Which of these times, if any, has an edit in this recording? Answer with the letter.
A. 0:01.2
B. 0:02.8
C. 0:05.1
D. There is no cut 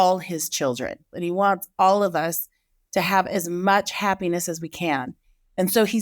A